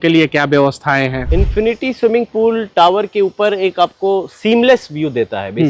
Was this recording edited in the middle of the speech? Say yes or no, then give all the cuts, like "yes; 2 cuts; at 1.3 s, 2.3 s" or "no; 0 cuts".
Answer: yes; 1 cut; at 1.2 s